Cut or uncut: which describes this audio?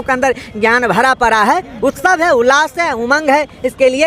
uncut